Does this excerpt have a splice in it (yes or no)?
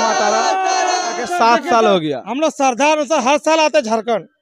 yes